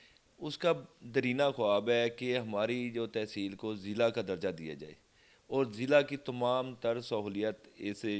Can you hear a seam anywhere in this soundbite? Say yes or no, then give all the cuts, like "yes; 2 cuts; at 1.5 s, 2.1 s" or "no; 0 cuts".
no; 0 cuts